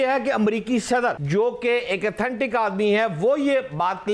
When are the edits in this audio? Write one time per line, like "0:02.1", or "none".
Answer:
0:01.2